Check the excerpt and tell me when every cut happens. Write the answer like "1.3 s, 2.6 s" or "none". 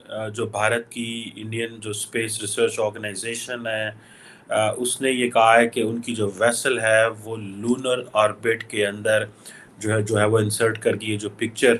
none

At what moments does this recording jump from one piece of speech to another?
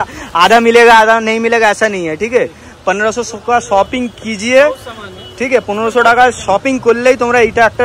none

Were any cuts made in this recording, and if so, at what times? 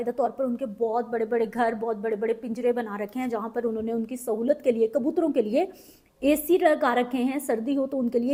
none

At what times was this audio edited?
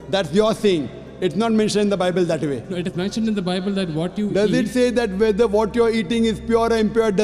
none

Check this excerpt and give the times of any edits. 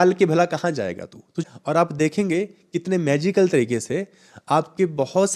1.4 s

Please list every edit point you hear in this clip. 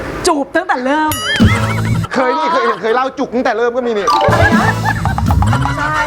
2.0 s

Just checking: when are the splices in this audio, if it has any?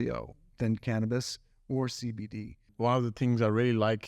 2.7 s

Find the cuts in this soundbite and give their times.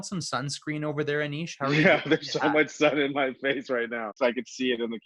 4.2 s

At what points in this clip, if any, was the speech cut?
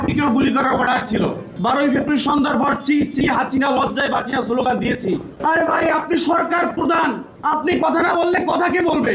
1.5 s, 5.3 s, 7.3 s

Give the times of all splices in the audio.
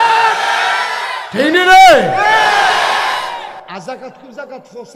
3.6 s

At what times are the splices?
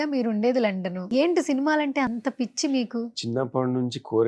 1.1 s

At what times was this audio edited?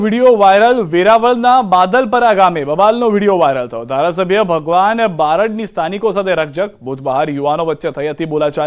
7.2 s

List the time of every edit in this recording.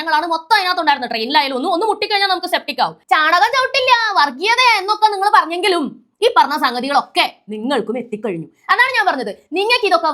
3.0 s

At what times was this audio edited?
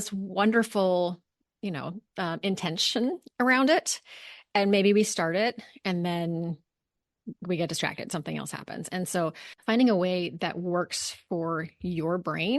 9.5 s

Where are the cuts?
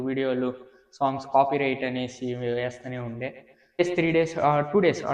3.8 s

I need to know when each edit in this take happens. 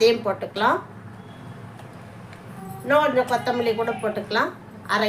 1.2 s, 2.6 s

